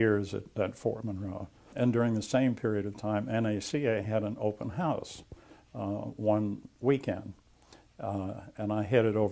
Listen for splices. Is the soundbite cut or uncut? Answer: uncut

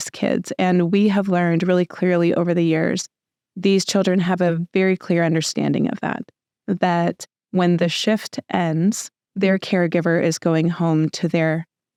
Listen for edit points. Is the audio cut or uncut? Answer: uncut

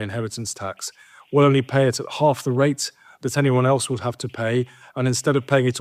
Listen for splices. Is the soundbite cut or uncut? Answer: uncut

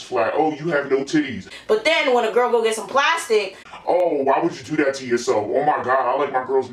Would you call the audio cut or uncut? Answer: uncut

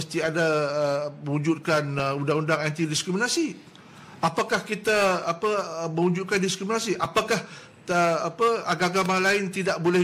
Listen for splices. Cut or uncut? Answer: uncut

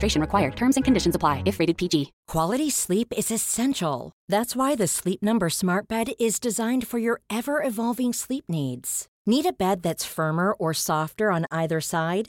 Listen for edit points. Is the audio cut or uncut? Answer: cut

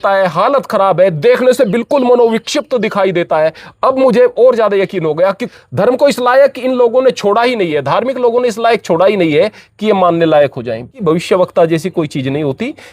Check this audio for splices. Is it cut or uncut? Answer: cut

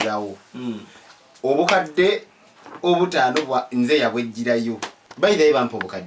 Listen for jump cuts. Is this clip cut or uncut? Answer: cut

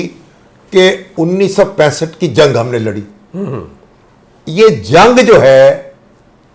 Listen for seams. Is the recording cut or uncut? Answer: uncut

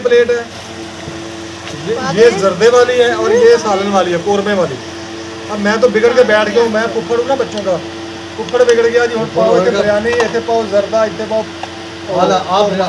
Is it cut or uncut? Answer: uncut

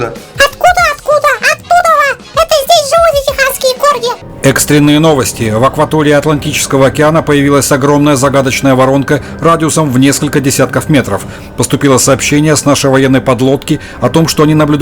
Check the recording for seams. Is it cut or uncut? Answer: cut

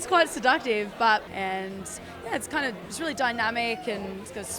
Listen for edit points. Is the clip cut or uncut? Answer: cut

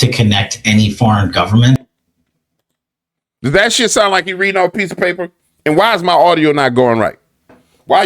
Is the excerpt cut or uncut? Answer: uncut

